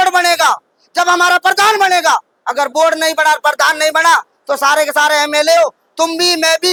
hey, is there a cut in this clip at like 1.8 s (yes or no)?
no